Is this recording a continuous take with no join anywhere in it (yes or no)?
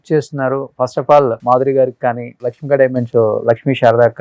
yes